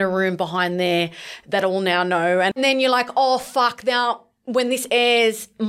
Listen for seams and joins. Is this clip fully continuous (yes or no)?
no